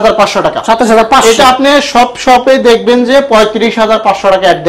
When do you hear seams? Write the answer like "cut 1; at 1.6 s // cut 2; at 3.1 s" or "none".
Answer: none